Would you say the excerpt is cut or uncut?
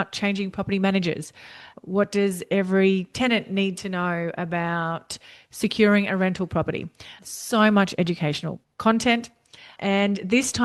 uncut